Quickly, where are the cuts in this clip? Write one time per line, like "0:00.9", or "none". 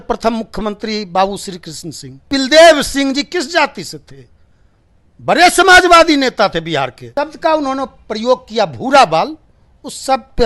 0:02.3
0:07.0